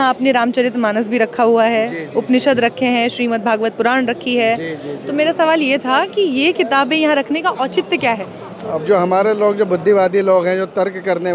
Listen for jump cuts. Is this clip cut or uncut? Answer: uncut